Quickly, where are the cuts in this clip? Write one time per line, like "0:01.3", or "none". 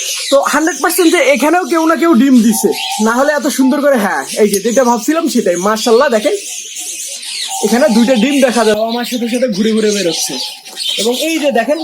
0:08.8